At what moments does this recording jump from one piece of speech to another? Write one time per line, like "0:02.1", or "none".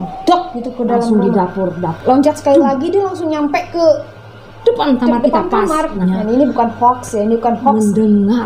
0:01.8
0:06.0